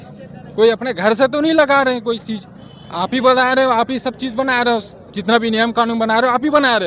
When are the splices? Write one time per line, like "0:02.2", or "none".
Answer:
none